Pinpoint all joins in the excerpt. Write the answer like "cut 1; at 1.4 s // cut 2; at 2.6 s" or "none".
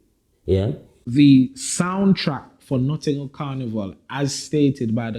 cut 1; at 0.9 s